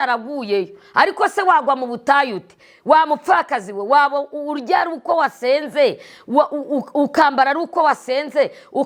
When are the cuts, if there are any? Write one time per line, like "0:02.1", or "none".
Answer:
none